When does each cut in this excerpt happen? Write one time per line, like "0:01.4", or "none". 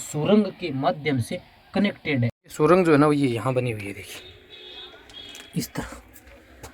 0:02.4

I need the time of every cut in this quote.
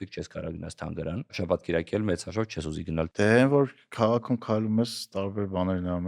0:01.4
0:03.1

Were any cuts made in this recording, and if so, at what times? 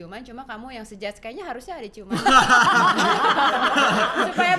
none

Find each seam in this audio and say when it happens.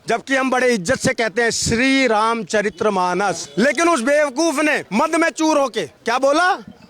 0:03.4
0:04.8
0:05.9

